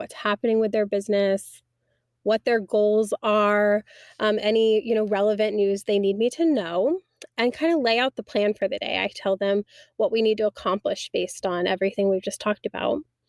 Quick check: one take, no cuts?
yes; 0 cuts

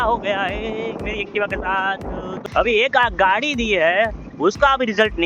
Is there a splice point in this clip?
yes; 1 cut; at 2.3 s

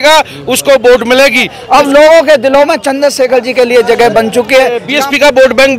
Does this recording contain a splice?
yes; 2 cuts; at 1.6 s, 4.9 s

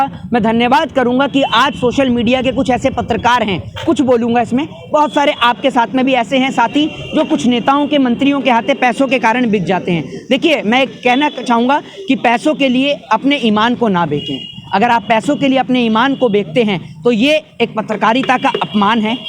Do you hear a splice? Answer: no; 0 cuts

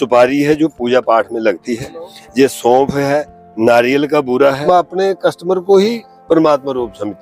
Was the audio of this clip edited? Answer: yes; 1 cut; at 4.2 s

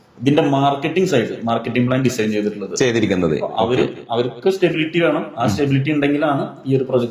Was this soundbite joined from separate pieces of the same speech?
no; 0 cuts

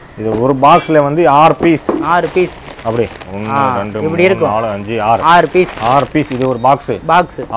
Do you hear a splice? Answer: no; 0 cuts

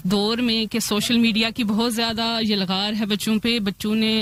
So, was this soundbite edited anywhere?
no; 0 cuts

